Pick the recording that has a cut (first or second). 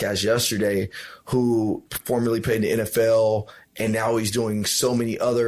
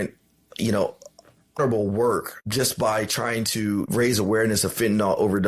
second